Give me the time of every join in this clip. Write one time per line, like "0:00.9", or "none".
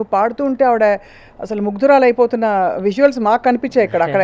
none